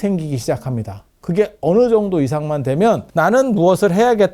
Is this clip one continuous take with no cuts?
no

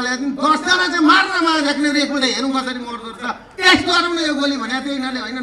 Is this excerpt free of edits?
yes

